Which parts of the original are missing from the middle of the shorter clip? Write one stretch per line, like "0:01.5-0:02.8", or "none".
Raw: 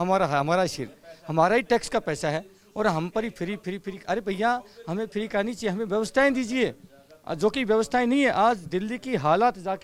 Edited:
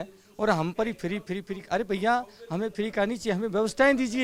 none